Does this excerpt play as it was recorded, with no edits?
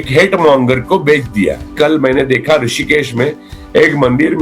no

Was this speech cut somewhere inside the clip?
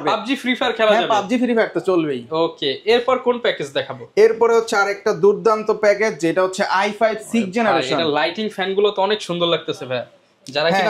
no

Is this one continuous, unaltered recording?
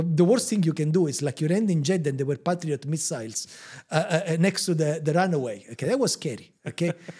yes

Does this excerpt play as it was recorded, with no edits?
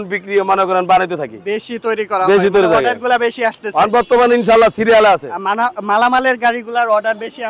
yes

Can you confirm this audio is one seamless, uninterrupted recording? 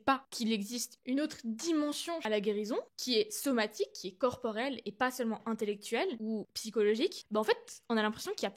no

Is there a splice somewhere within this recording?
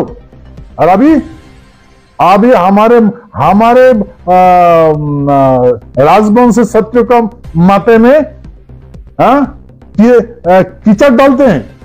no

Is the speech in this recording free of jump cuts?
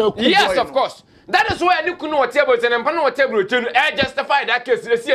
yes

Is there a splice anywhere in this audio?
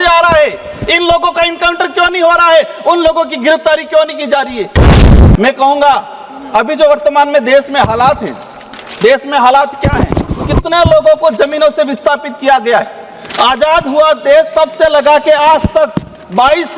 yes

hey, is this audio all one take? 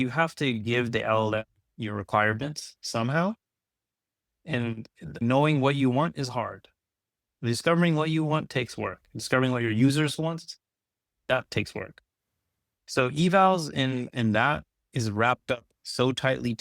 no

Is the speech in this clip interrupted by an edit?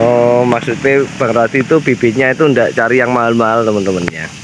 no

